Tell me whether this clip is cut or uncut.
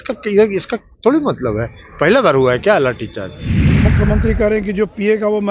cut